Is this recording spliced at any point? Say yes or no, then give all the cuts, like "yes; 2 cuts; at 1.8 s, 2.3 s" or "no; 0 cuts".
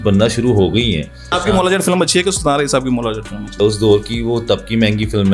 yes; 2 cuts; at 1.4 s, 3.6 s